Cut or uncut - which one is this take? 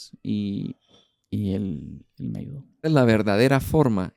cut